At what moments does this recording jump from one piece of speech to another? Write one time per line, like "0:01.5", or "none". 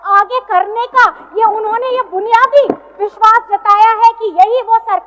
none